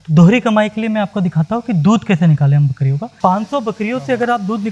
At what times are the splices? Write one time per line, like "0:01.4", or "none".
0:03.2